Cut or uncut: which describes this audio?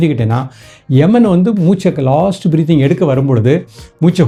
uncut